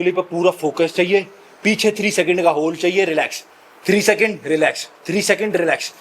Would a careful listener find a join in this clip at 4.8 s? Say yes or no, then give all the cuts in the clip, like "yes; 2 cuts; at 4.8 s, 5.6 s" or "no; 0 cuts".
no; 0 cuts